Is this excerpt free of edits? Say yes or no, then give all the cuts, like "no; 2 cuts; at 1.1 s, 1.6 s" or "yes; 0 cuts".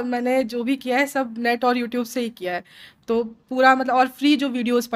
yes; 0 cuts